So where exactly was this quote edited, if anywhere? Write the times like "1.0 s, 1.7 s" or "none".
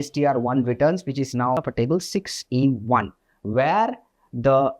1.6 s

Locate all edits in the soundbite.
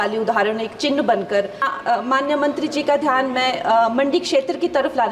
1.7 s

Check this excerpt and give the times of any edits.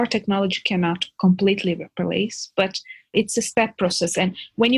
3.1 s

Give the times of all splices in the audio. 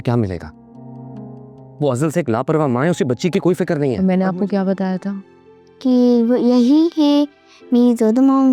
4.0 s

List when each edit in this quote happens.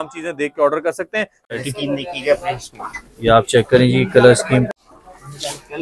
1.6 s, 4.7 s

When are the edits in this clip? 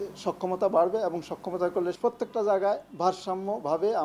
2.0 s

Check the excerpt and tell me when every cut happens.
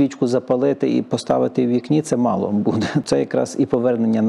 3.1 s

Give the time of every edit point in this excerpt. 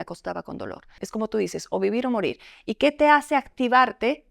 1.0 s

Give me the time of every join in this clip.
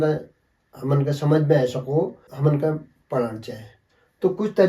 2.2 s

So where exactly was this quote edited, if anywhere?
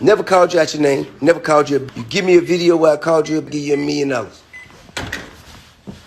1.1 s, 2.0 s, 4.5 s

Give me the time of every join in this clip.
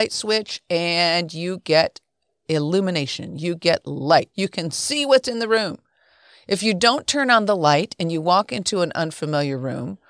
4.3 s

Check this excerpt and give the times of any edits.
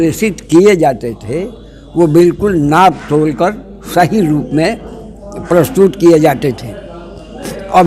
none

